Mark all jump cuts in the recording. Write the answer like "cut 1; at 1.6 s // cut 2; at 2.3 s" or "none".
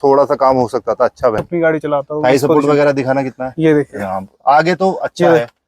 cut 1; at 1.4 s

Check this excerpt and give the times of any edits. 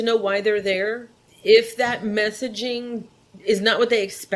cut 1; at 1.3 s

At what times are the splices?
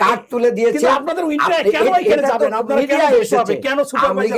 none

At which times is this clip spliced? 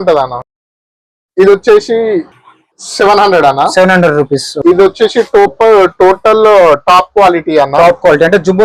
cut 1; at 4.5 s

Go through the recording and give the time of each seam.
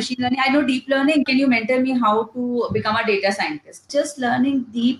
cut 1; at 1.3 s // cut 2; at 3.9 s

